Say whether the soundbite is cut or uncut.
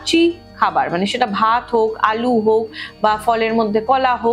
uncut